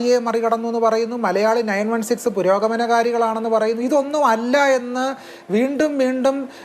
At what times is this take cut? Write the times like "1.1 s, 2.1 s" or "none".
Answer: none